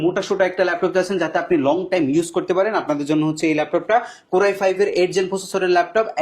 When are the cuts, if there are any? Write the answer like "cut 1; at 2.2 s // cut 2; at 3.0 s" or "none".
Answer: none